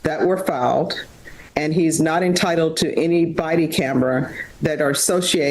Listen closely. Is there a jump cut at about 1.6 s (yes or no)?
no